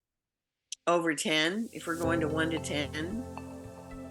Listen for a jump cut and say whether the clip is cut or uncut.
uncut